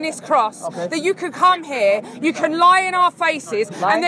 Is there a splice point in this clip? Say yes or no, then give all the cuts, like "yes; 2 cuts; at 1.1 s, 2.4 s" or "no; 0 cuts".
no; 0 cuts